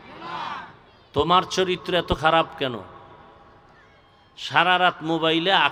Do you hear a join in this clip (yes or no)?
no